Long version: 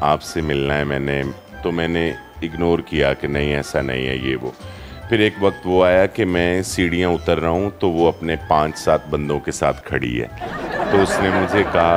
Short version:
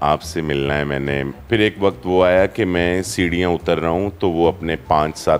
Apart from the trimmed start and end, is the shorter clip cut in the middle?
yes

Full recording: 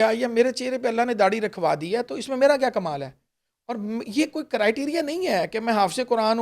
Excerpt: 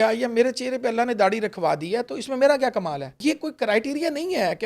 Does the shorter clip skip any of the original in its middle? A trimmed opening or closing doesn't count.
yes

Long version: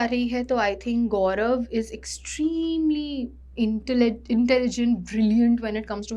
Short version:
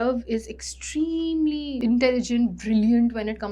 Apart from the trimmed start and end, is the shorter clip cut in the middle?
yes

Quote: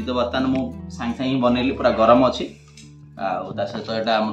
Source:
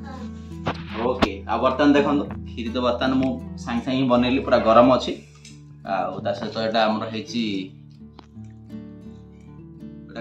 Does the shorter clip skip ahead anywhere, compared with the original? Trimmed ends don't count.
no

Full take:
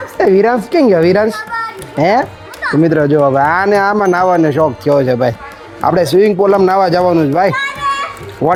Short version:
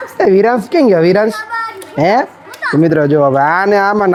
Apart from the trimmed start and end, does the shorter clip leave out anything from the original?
no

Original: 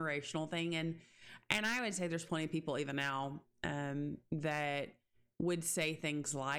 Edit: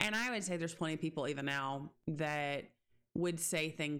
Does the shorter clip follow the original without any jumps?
no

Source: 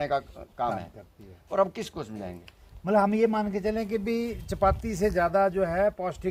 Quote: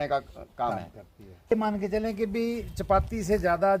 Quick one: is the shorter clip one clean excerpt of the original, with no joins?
no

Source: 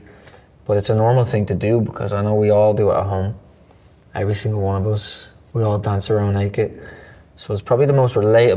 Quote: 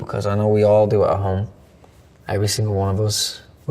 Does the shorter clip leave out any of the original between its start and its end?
no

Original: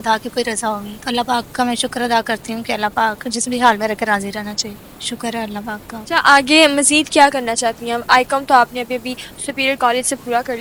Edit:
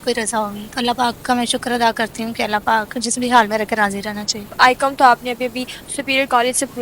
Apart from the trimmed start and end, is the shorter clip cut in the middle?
yes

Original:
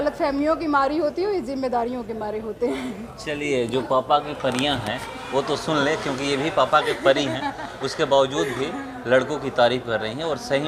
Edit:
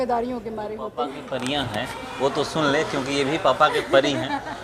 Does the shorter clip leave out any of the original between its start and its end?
yes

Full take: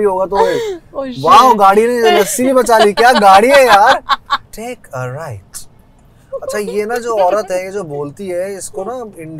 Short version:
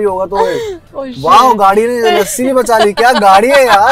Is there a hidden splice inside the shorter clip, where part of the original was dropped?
no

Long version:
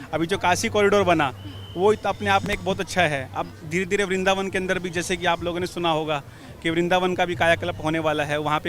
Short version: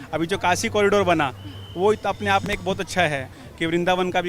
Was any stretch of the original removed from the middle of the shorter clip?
yes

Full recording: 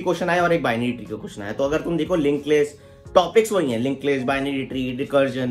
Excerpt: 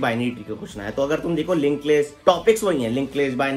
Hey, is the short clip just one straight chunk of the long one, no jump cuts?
no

